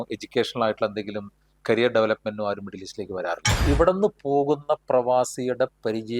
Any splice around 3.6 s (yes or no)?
yes